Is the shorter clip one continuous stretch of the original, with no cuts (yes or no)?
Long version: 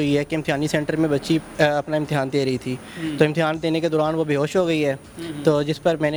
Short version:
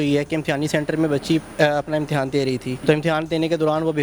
no